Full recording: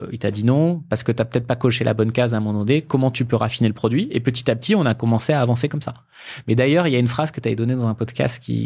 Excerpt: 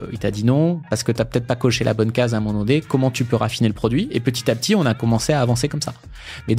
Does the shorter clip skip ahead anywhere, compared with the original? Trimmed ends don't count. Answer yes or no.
no